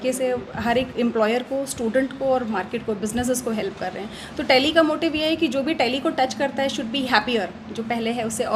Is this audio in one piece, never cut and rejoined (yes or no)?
yes